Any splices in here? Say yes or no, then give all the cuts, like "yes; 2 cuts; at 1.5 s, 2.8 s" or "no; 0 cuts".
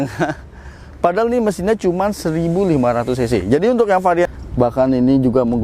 yes; 1 cut; at 4.3 s